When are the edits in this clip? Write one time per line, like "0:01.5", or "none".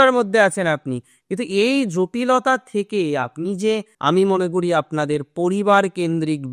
0:03.9